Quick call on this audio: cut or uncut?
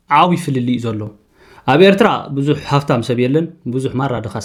uncut